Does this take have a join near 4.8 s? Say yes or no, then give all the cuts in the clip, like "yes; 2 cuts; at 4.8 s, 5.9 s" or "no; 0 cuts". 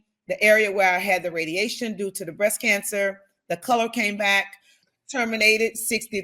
yes; 1 cut; at 4.8 s